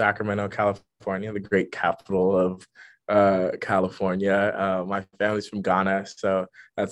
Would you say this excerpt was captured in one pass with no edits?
yes; 0 cuts

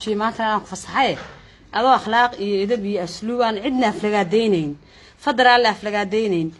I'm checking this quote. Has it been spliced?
no; 0 cuts

